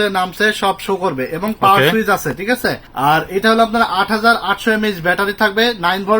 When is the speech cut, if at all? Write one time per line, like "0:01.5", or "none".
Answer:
0:02.8